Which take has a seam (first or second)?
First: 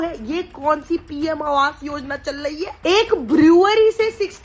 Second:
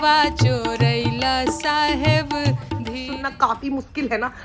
second